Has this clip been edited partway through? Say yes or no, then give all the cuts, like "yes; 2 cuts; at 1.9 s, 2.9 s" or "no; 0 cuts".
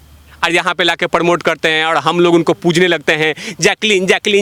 no; 0 cuts